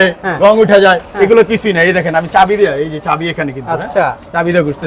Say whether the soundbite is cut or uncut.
uncut